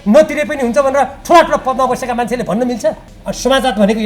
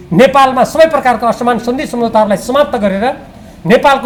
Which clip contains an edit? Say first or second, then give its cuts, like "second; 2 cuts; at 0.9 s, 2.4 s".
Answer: first; 1 cut; at 3.1 s